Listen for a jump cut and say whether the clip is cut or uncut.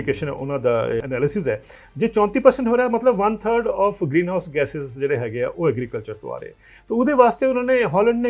cut